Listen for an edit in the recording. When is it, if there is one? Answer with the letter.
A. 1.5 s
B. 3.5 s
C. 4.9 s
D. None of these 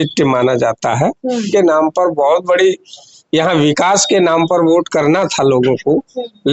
A